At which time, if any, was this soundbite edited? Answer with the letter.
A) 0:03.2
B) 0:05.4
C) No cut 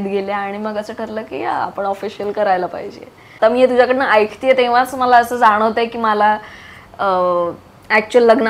A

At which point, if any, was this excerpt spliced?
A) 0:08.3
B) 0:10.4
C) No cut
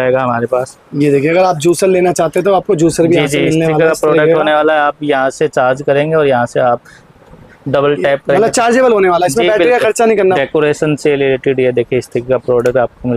B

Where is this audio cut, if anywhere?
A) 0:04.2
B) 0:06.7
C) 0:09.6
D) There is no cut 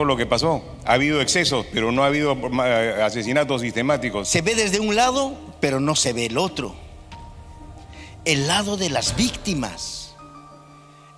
A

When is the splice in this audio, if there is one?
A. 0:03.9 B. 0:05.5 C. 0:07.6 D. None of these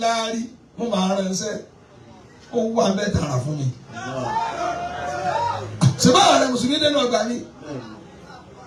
D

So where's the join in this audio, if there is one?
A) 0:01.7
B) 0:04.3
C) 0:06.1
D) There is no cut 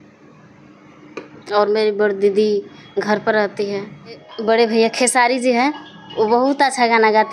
B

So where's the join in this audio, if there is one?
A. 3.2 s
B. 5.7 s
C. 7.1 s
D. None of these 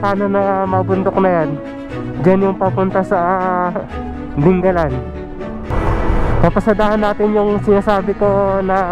B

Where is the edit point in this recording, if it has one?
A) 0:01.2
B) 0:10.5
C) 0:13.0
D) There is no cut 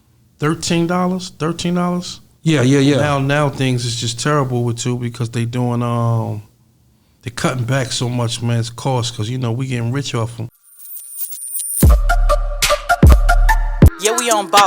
B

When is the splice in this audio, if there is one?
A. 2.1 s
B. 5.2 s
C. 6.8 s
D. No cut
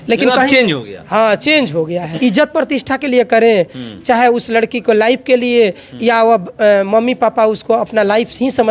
A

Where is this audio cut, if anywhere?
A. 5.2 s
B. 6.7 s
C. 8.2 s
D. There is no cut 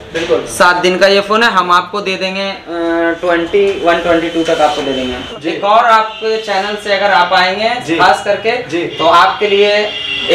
A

